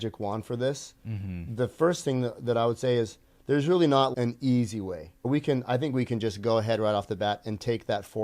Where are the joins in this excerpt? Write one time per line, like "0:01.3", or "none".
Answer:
0:04.1
0:05.2